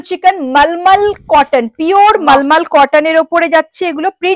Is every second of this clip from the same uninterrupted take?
yes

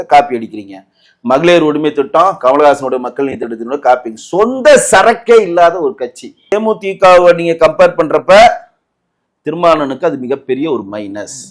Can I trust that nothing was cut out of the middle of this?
no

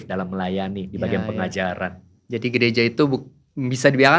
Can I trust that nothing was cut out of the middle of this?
yes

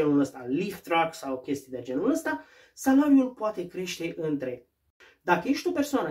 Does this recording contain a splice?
yes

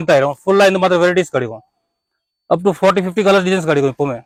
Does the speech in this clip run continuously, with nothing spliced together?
yes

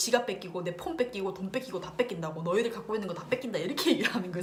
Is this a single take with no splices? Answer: yes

